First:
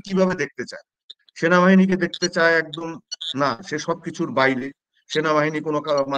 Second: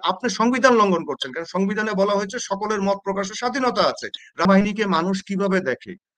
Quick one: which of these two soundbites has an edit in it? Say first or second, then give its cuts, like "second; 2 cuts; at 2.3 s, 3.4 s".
second; 1 cut; at 4.5 s